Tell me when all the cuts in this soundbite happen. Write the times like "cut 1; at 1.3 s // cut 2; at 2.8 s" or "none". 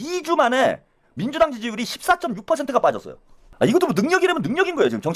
none